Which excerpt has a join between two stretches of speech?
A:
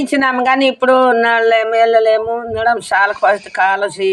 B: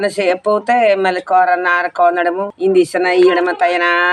B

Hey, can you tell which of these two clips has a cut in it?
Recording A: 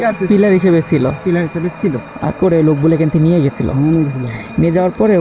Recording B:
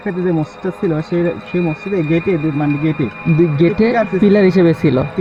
A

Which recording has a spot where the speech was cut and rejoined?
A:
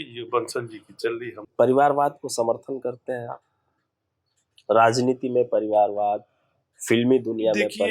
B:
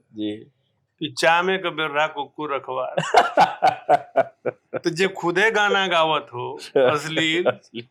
A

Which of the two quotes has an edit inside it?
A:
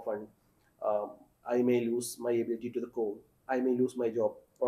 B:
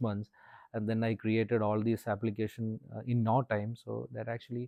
A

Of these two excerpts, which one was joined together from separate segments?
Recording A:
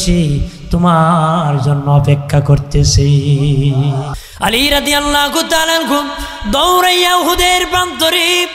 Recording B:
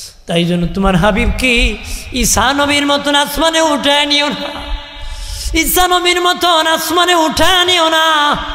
A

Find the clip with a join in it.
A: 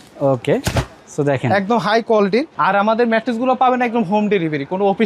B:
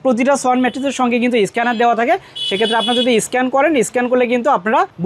A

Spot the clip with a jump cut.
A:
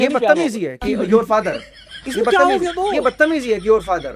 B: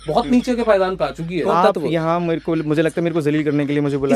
B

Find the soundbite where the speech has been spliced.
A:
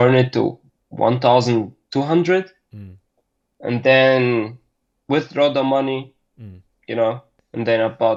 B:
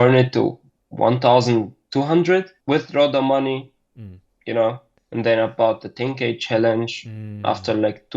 B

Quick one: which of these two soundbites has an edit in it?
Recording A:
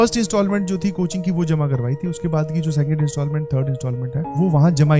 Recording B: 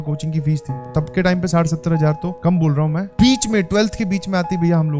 B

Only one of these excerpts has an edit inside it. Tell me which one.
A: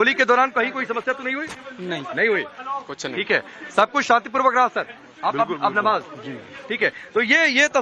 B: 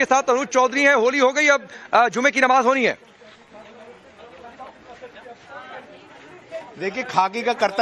A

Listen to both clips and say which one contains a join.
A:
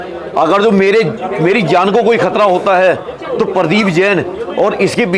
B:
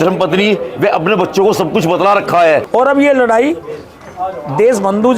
B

